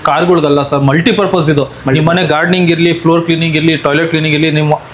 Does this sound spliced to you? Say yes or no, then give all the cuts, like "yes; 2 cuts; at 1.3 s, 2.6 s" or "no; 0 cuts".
no; 0 cuts